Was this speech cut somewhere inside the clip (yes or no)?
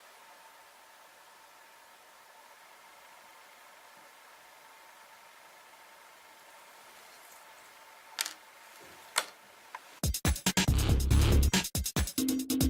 no